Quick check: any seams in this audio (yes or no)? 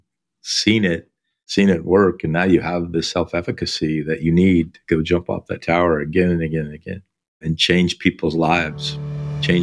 no